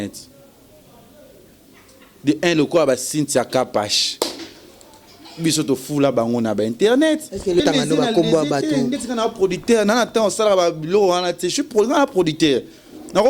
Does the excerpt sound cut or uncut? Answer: cut